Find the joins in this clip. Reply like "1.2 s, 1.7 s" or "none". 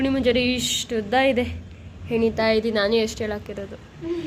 none

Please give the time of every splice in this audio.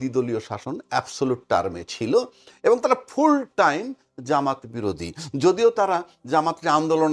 none

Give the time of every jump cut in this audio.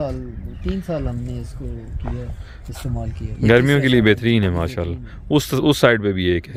none

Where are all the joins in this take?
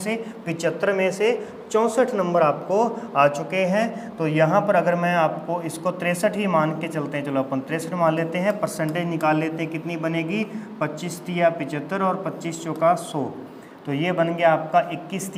none

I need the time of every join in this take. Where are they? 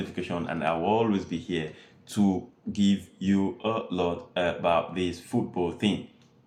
none

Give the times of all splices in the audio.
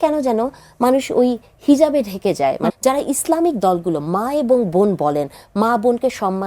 2.8 s

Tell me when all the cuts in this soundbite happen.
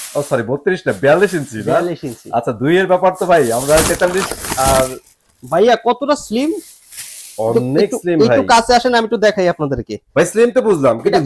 none

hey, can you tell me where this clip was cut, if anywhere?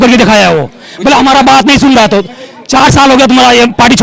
none

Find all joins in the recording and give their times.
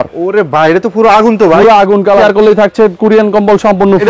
2.2 s

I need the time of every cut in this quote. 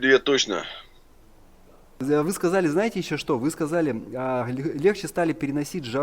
2.0 s

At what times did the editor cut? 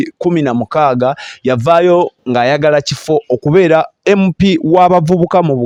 none

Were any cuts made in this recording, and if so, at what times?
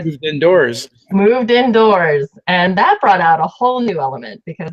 3.2 s

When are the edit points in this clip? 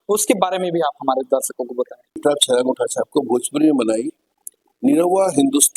2.2 s

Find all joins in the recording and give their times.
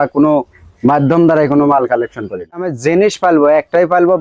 2.6 s

